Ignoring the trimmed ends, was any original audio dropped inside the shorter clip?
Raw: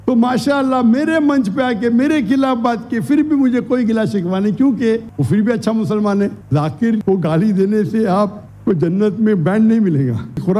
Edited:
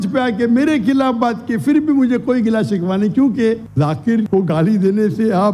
yes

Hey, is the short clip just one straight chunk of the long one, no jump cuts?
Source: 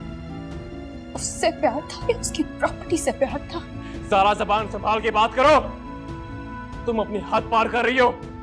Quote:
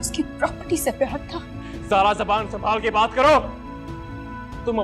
yes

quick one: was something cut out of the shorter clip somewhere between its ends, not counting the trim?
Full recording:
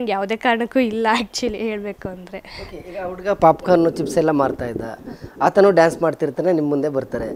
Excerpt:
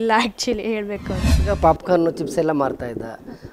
yes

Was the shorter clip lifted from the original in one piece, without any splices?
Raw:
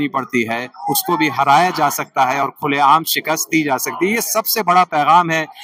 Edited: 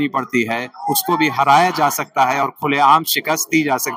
yes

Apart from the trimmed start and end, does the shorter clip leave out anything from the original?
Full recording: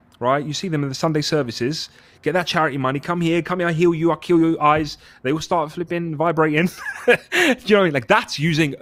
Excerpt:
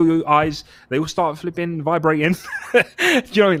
no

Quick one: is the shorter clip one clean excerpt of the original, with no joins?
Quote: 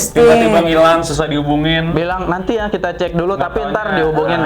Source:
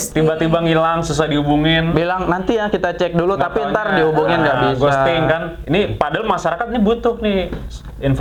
yes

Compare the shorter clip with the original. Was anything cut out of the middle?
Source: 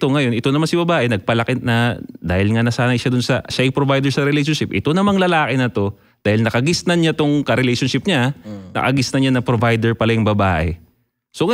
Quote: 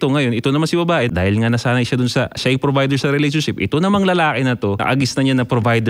yes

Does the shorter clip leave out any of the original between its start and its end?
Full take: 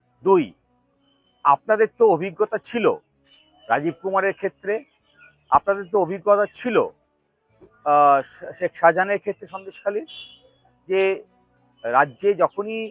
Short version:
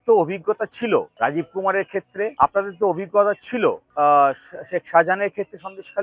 yes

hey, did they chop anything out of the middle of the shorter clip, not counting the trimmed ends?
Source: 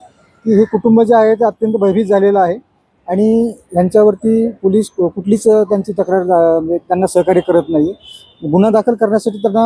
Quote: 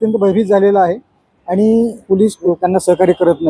yes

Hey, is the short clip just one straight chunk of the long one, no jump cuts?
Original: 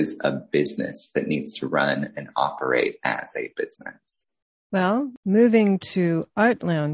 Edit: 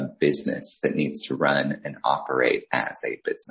yes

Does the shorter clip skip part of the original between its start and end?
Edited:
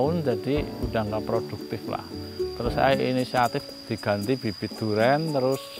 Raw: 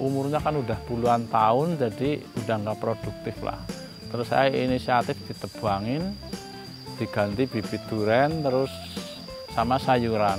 yes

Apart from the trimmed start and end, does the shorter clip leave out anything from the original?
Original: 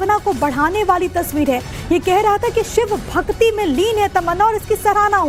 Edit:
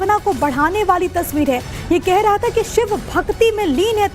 no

